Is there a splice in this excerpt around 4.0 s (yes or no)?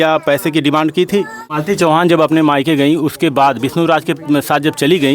no